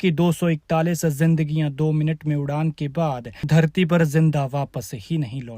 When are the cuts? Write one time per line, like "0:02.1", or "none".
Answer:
0:03.3